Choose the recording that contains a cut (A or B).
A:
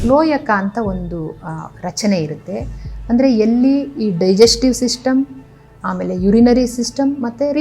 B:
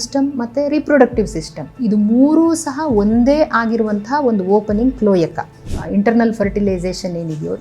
B